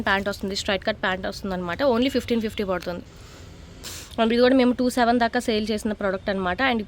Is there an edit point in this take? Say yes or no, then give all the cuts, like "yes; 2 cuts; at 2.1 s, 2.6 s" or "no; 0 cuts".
yes; 1 cut; at 3.9 s